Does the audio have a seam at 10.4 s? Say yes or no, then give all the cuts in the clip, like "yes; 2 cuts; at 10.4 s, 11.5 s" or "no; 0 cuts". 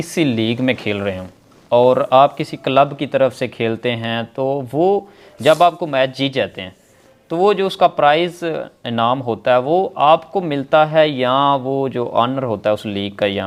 no; 0 cuts